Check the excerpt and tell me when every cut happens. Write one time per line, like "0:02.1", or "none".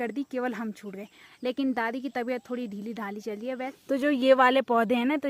0:01.2
0:03.7